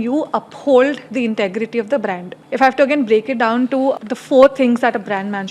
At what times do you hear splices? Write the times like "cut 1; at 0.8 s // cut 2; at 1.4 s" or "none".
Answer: cut 1; at 2.3 s // cut 2; at 4.0 s